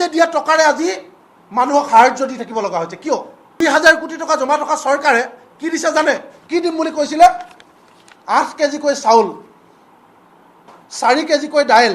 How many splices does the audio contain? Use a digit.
1